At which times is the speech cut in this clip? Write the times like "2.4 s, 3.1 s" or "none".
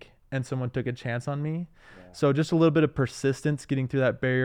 none

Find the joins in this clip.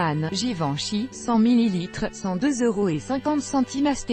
none

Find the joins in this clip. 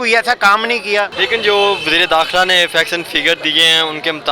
1.1 s

